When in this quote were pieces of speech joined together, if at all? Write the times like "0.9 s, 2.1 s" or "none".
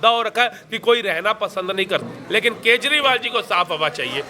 2.0 s